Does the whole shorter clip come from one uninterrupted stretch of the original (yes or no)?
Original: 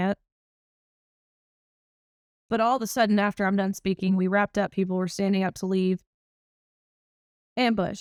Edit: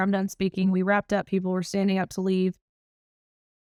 yes